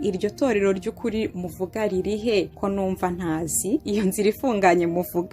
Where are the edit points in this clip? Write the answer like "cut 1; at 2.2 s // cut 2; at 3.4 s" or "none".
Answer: cut 1; at 2.5 s // cut 2; at 3.9 s